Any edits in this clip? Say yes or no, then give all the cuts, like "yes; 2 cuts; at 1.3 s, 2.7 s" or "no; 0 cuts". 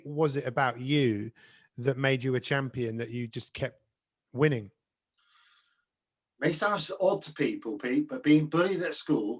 no; 0 cuts